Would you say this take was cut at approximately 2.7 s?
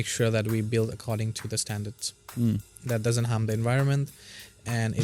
no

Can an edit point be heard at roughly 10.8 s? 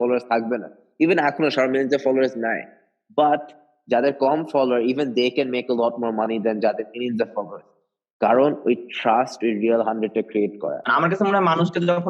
yes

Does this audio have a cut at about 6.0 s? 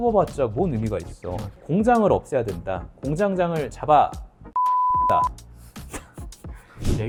no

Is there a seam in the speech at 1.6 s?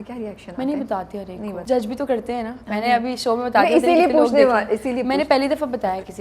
yes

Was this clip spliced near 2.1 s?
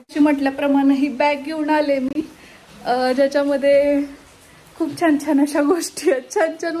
no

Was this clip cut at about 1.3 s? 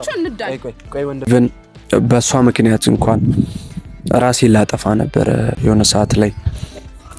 yes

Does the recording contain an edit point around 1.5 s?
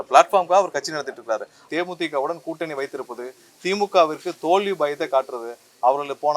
yes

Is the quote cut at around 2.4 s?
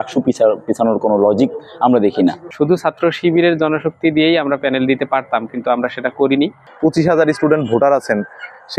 yes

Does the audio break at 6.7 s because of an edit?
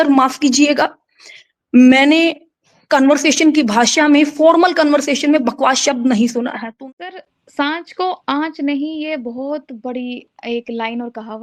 yes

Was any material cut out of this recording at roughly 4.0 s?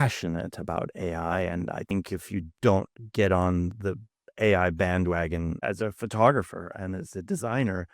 no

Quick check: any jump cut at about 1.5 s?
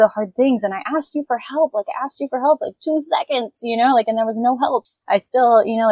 no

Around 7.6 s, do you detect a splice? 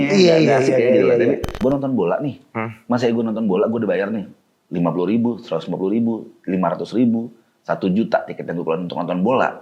no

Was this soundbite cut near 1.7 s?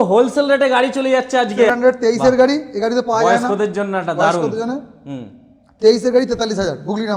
yes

